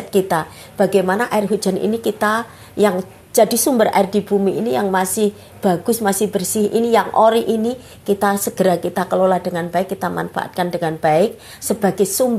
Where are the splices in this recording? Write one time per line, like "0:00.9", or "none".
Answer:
none